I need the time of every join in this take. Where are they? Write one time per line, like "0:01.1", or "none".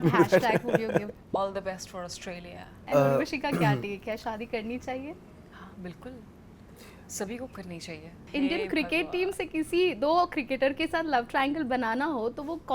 0:01.1
0:02.8
0:05.3
0:08.1